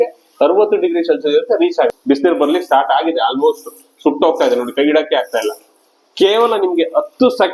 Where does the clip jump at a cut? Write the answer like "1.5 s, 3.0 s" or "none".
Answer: 1.9 s